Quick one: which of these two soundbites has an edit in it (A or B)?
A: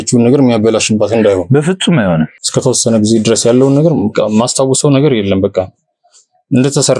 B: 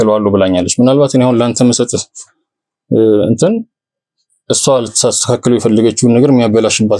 A